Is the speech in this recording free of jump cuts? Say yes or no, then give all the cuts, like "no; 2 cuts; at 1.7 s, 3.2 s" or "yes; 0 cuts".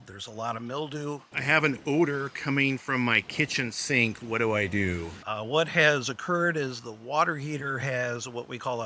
no; 2 cuts; at 1.3 s, 5.2 s